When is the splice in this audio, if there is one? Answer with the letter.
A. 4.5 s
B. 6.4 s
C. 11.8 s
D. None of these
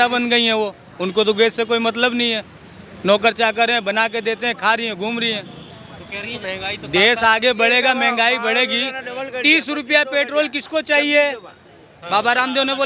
B